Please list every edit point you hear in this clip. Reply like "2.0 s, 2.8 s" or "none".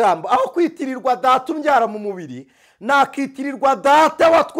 none